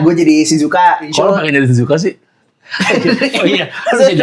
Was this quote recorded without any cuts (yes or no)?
no